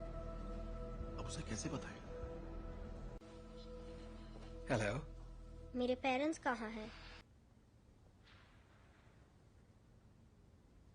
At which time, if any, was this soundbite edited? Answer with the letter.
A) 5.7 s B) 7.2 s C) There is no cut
B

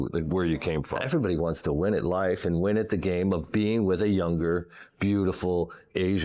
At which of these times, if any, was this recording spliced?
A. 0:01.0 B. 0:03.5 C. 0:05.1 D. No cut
A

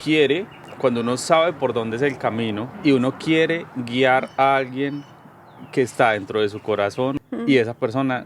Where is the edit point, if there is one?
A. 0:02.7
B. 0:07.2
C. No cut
B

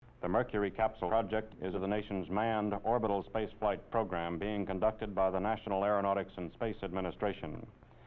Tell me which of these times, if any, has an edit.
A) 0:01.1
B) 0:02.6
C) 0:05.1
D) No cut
A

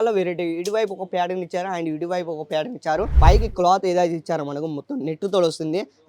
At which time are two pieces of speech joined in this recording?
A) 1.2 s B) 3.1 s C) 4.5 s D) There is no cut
B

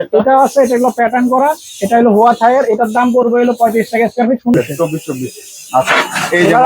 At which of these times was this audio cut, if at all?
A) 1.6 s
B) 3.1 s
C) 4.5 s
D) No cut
C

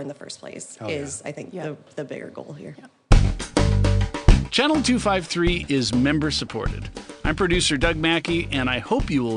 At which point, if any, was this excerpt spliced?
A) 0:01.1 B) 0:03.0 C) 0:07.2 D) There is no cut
B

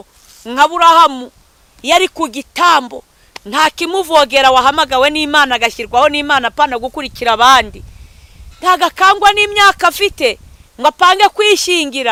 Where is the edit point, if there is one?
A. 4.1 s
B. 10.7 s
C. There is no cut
C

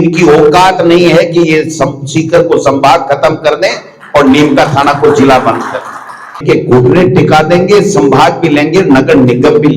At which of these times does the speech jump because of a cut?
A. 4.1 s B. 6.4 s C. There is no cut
B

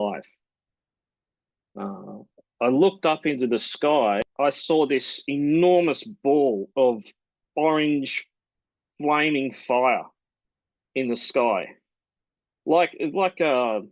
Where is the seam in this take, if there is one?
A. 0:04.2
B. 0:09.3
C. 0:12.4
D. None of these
A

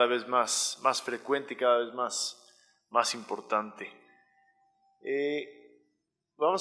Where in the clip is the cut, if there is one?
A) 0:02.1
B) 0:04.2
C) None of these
A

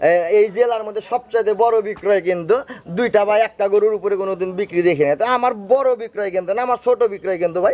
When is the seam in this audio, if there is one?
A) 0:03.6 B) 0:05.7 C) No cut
C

